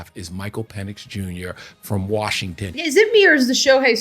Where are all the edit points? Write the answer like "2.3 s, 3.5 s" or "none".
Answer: 2.8 s